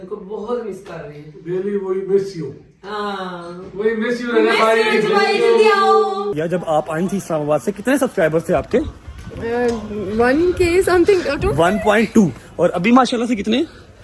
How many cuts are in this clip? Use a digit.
2